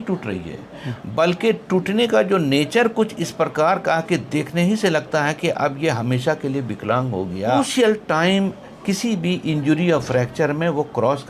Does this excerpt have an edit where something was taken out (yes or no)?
yes